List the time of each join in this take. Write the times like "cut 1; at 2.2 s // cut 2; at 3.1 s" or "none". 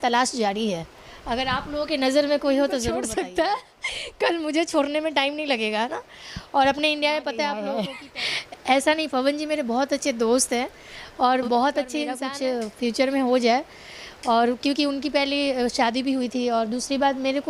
cut 1; at 3.0 s // cut 2; at 7.8 s // cut 3; at 12.2 s